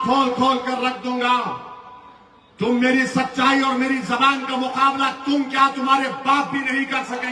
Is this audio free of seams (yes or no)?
yes